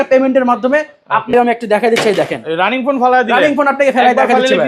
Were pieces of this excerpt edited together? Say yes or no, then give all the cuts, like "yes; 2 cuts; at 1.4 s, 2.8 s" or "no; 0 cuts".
yes; 1 cut; at 1.3 s